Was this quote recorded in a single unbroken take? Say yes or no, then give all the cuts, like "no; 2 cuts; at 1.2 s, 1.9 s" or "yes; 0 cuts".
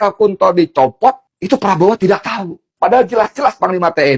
no; 2 cuts; at 1.3 s, 2.6 s